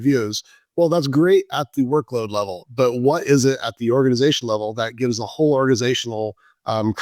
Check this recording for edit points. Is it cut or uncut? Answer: uncut